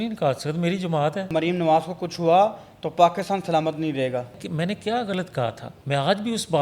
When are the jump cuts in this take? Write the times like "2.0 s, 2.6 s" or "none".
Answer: 1.3 s, 4.4 s, 5.7 s